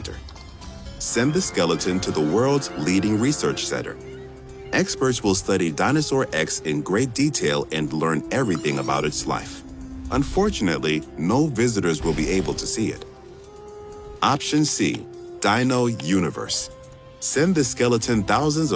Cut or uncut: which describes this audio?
cut